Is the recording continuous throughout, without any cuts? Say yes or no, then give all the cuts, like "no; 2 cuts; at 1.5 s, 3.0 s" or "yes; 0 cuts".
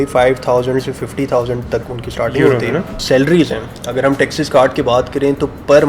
no; 1 cut; at 2.9 s